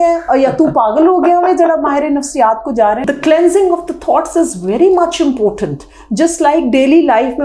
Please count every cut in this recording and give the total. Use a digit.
1